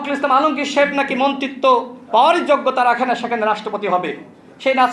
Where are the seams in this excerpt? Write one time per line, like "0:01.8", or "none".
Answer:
none